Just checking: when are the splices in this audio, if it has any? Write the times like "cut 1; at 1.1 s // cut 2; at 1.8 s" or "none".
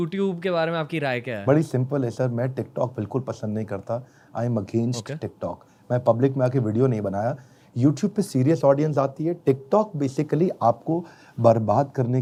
none